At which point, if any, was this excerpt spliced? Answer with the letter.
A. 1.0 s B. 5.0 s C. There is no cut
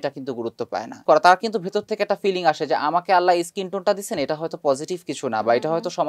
A